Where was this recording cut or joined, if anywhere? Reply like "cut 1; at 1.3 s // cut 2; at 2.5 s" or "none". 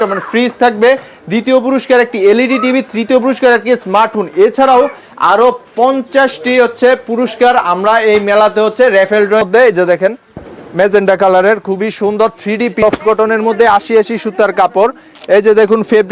cut 1; at 9.5 s // cut 2; at 12.8 s